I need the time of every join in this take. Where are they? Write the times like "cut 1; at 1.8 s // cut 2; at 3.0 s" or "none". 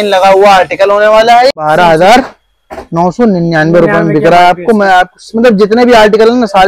cut 1; at 1.6 s